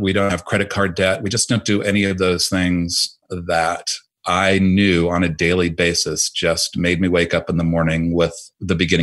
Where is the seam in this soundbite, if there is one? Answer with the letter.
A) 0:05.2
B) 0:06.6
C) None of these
C